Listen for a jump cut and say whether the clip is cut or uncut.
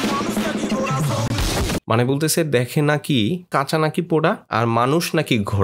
cut